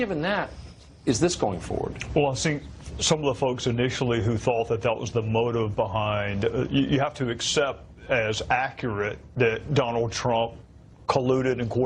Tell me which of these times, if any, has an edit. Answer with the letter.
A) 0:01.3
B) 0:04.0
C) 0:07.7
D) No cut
A